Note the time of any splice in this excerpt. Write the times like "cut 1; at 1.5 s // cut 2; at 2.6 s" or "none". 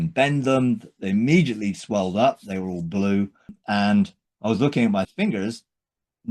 cut 1; at 3.6 s // cut 2; at 5.1 s